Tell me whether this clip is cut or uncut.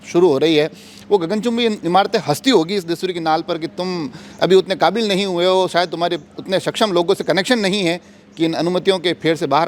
uncut